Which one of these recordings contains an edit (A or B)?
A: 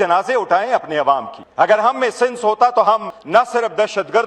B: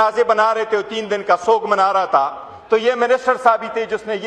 A